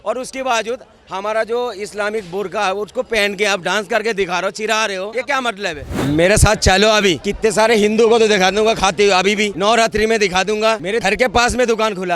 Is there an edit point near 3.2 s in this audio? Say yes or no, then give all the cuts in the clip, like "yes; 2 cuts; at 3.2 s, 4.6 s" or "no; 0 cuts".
no; 5 cuts; at 5.1 s, 5.9 s, 7.3 s, 9.5 s, 10.9 s